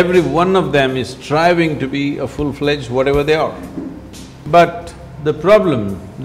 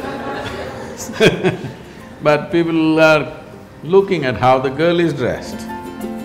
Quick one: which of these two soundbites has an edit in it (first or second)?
first